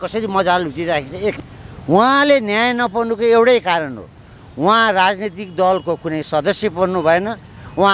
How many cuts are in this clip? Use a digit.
1